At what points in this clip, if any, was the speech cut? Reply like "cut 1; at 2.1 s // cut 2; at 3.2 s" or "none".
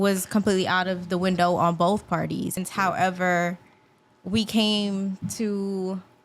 cut 1; at 2.6 s

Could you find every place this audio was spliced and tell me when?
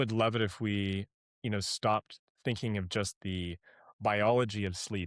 none

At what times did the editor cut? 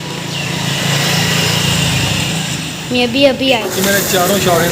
cut 1; at 3.6 s

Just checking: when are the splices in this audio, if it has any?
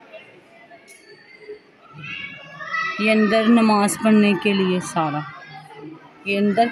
none

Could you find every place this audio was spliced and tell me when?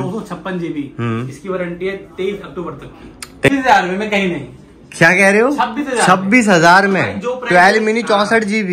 cut 1; at 3.5 s

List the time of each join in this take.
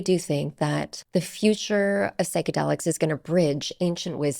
cut 1; at 0.9 s

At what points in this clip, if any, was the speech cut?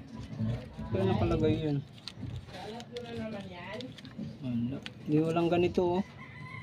none

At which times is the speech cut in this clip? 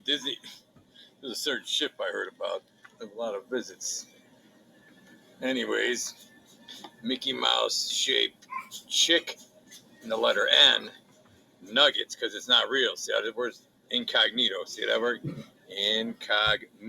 cut 1; at 12.6 s

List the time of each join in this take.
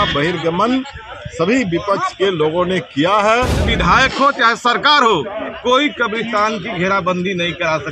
cut 1; at 3.6 s

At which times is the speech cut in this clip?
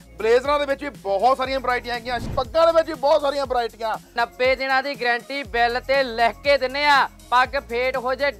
cut 1; at 2.3 s // cut 2; at 4.1 s

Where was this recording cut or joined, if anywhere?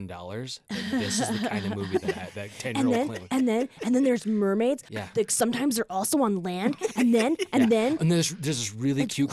cut 1; at 8.0 s

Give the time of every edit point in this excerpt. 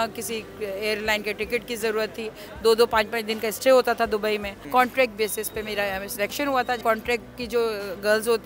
cut 1; at 4.5 s // cut 2; at 6.8 s

